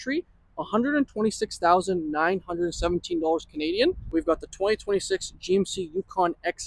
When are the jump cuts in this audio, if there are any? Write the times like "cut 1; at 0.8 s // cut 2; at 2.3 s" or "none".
none